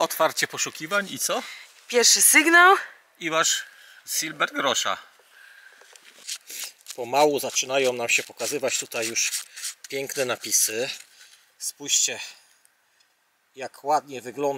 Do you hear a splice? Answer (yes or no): yes